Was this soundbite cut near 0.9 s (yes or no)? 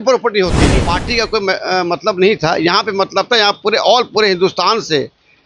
yes